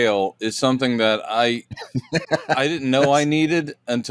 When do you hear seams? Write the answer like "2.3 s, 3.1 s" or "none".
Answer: none